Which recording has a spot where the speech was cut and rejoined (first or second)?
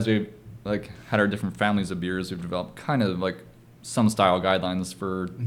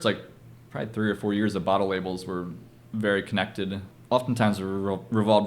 second